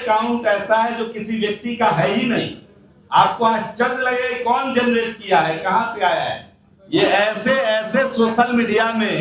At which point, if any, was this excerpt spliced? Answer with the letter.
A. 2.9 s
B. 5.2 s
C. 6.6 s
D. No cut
D